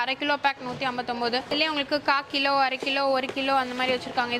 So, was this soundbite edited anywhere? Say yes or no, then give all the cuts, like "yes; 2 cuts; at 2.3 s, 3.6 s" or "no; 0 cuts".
no; 0 cuts